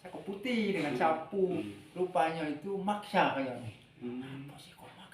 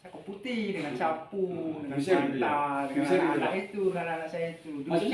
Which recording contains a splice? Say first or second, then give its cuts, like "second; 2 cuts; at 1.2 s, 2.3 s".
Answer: first; 1 cut; at 1.6 s